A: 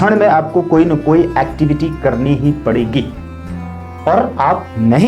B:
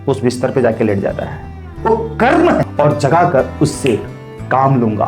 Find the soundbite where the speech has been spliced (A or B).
B